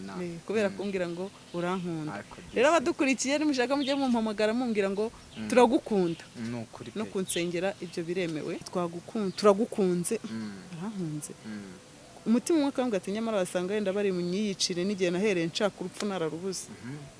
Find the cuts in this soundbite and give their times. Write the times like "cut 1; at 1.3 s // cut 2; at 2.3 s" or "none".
cut 1; at 8.6 s